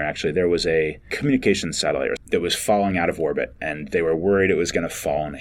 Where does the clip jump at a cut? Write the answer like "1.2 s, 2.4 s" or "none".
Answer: 1.1 s, 2.2 s